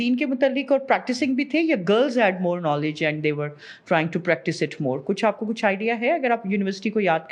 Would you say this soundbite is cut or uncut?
uncut